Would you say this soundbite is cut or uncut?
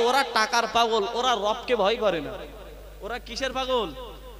uncut